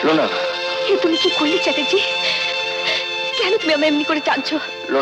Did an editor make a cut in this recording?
no; 0 cuts

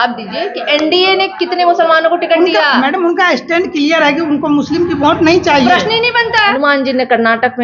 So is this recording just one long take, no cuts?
no; 1 cut; at 6.6 s

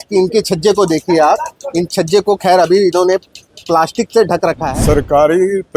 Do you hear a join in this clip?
yes; 1 cut; at 4.7 s

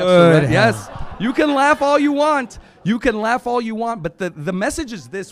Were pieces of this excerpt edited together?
no; 0 cuts

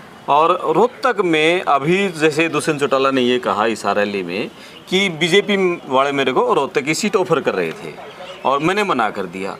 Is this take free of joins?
yes; 0 cuts

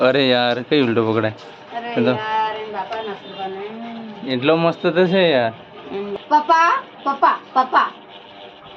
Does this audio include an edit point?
yes; 1 cut; at 6.1 s

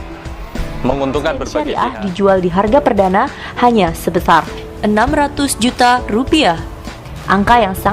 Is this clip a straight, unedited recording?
no; 1 cut; at 1.7 s

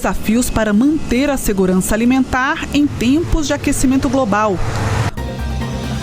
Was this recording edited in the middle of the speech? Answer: yes; 1 cut; at 5.1 s

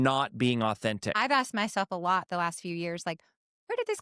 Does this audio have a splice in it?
yes; 1 cut; at 1.2 s

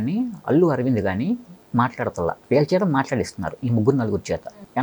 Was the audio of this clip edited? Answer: no; 0 cuts

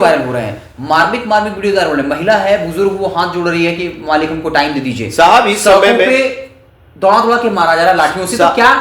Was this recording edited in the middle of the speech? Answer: no; 0 cuts

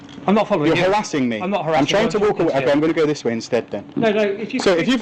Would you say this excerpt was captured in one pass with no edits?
yes; 0 cuts

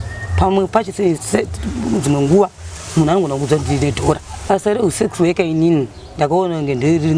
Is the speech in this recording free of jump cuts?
no; 1 cut; at 4.4 s

